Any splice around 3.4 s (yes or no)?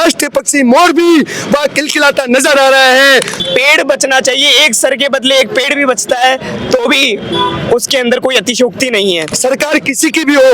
yes